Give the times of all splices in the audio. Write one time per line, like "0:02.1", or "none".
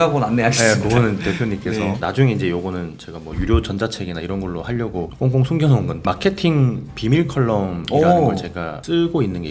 none